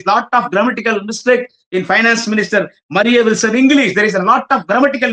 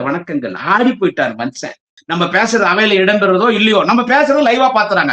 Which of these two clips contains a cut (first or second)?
second